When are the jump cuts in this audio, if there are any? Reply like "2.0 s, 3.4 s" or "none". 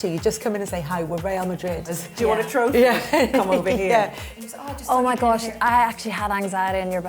2.0 s, 4.3 s